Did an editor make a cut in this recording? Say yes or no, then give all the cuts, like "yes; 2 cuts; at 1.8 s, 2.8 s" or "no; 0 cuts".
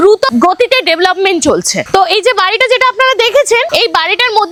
no; 0 cuts